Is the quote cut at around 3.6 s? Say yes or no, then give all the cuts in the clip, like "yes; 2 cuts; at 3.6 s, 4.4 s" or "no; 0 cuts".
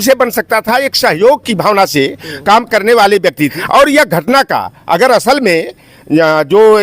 yes; 1 cut; at 3.6 s